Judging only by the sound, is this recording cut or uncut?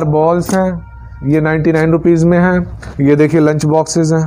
cut